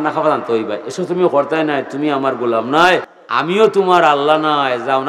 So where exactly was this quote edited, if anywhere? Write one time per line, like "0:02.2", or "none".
0:03.2

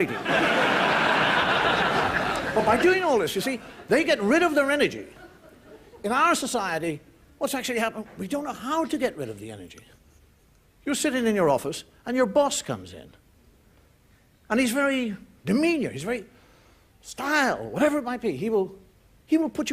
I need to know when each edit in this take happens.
0:02.9

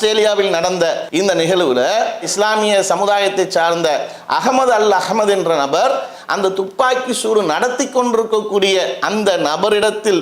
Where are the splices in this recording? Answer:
0:01.0

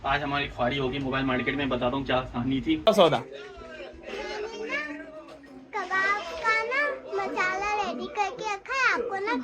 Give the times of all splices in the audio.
0:02.9

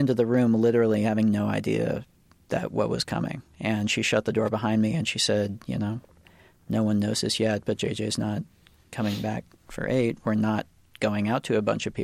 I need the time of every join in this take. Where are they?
none

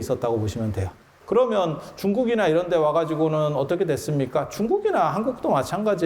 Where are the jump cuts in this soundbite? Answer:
0:01.1

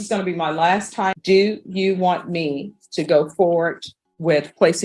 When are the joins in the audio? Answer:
0:01.2

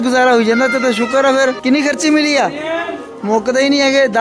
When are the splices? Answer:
0:01.6

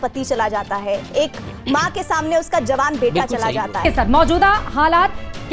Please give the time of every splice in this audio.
0:03.7

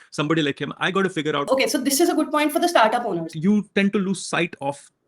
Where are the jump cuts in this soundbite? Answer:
0:01.4
0:03.3

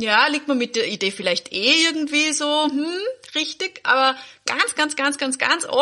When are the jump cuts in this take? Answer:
none

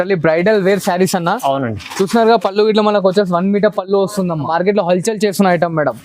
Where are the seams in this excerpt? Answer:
0:04.5

